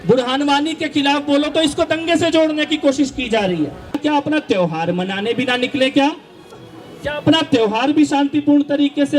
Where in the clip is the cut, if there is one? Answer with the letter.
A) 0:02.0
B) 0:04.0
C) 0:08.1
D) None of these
B